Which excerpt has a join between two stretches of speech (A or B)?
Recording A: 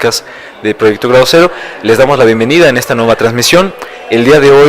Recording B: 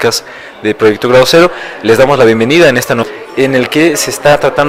A